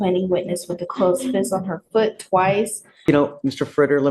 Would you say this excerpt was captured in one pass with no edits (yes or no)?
no